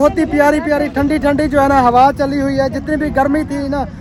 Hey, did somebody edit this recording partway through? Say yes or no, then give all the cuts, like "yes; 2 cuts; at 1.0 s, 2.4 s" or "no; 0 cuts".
no; 0 cuts